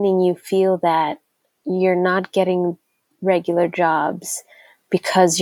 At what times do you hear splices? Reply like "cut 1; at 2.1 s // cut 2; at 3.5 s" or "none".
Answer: none